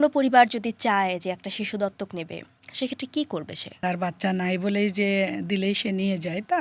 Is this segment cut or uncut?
cut